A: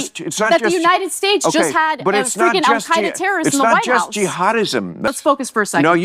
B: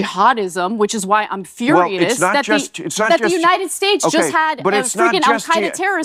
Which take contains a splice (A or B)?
A